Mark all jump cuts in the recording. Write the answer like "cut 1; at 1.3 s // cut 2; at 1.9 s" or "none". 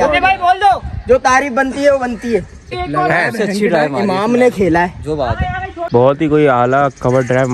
cut 1; at 2.8 s // cut 2; at 5.8 s